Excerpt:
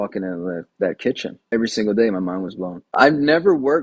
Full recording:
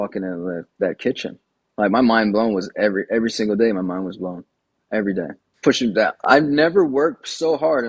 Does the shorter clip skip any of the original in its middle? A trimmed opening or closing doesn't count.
yes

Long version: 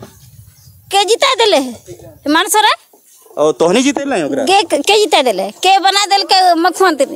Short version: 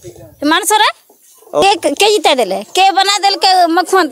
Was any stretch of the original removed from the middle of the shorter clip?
yes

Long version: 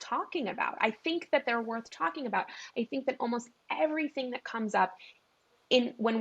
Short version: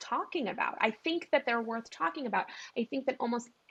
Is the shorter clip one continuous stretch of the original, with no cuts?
yes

